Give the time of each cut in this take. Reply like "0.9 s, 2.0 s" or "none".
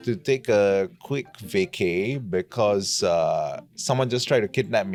none